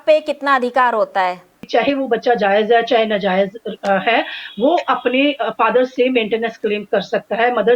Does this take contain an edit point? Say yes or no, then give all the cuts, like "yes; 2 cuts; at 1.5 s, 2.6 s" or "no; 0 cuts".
yes; 1 cut; at 1.6 s